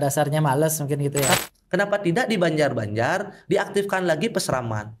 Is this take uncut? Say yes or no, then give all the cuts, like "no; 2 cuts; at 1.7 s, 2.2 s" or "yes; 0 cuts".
no; 1 cut; at 1.4 s